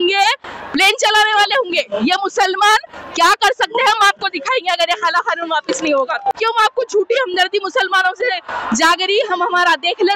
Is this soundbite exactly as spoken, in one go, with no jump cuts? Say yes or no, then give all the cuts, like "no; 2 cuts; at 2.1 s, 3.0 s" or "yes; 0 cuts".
no; 1 cut; at 6.3 s